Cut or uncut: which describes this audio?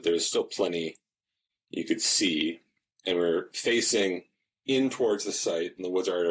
uncut